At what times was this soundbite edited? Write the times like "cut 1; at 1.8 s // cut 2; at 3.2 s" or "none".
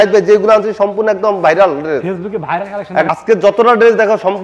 cut 1; at 3.1 s